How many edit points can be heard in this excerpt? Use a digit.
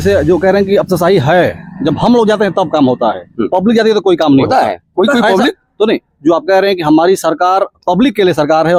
0